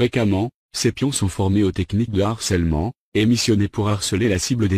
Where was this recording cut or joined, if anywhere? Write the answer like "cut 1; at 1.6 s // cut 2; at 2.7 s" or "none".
cut 1; at 1.3 s

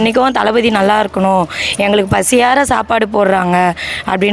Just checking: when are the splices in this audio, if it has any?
none

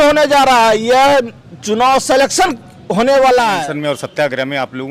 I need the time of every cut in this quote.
cut 1; at 3.6 s

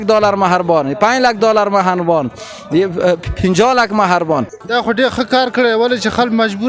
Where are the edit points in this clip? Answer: cut 1; at 4.6 s

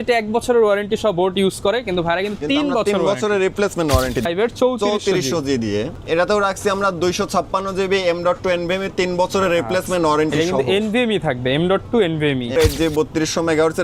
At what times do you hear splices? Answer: cut 1; at 4.3 s // cut 2; at 6.0 s // cut 3; at 12.6 s

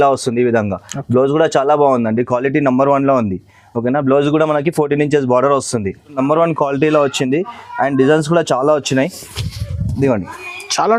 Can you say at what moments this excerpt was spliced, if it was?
cut 1; at 6.2 s

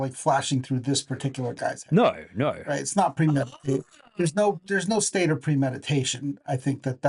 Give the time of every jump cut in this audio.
none

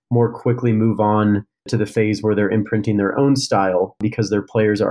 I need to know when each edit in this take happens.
cut 1; at 1.7 s // cut 2; at 4.0 s

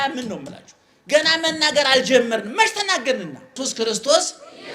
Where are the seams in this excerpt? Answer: cut 1; at 3.6 s

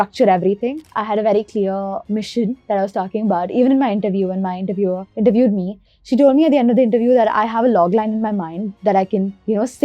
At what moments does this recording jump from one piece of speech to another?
cut 1; at 0.8 s // cut 2; at 5.8 s

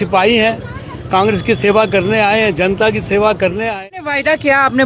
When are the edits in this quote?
cut 1; at 3.9 s

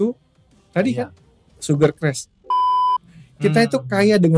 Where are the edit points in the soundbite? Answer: cut 1; at 2.7 s

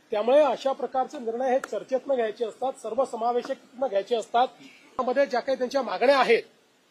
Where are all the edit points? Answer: cut 1; at 5.0 s

